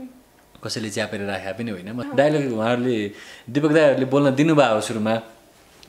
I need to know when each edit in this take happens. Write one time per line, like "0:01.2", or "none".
0:02.0